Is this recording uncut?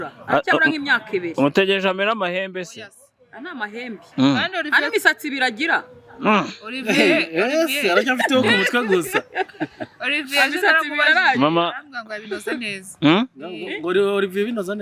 yes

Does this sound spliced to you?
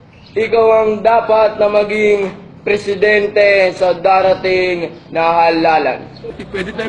yes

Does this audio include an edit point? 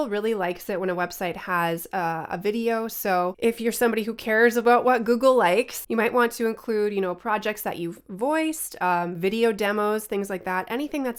no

